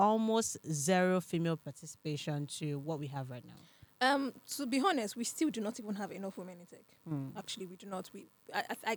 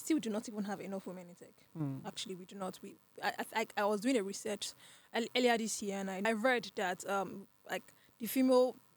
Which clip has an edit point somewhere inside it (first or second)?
second